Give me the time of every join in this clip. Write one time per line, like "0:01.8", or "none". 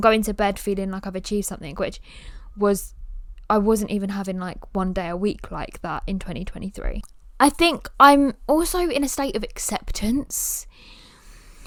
none